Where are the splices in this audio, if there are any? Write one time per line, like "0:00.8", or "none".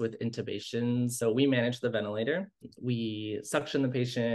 0:01.2
0:02.6